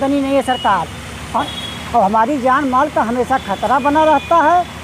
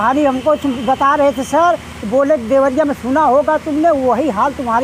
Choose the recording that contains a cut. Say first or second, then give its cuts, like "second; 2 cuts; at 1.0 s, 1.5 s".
first; 1 cut; at 1.4 s